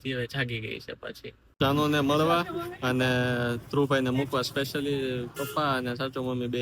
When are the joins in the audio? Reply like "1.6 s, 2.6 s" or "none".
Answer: 1.4 s